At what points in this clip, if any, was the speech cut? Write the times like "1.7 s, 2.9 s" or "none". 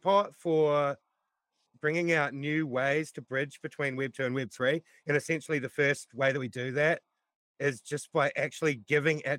1.7 s